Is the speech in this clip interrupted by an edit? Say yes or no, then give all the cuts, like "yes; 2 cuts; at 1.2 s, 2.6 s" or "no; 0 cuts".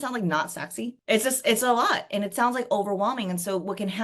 yes; 1 cut; at 1.0 s